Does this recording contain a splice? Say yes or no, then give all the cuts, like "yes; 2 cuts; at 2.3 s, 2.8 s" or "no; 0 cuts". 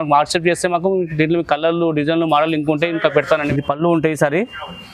yes; 1 cut; at 3.5 s